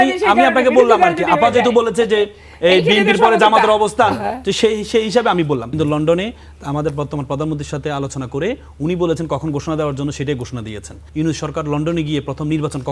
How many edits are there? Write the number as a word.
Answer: two